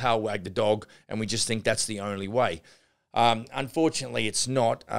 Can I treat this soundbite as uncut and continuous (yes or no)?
yes